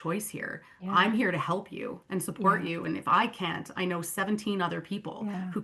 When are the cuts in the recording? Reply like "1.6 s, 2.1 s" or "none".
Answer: none